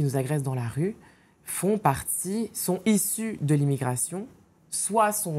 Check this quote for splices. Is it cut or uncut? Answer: uncut